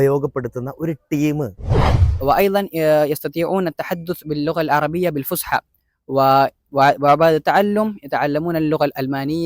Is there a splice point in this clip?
yes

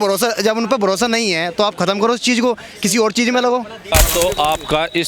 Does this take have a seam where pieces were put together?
yes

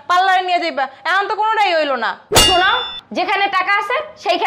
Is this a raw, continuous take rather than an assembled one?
no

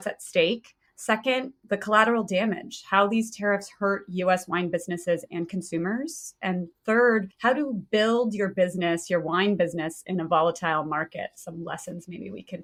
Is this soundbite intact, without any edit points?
yes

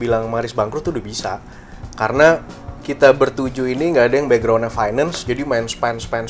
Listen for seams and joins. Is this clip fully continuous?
yes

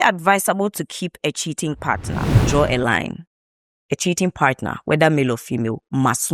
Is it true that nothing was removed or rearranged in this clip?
no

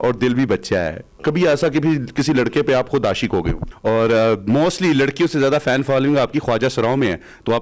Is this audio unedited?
no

